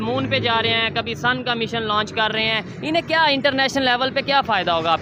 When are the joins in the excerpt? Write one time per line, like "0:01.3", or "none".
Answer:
none